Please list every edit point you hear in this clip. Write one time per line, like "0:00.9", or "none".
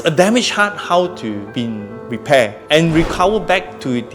0:01.7